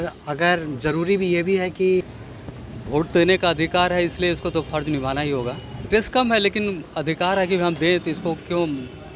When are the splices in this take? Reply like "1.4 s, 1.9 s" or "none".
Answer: 2.1 s, 5.8 s